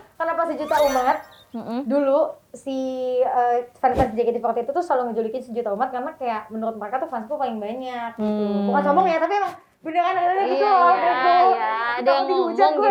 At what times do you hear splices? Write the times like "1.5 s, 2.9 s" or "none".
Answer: none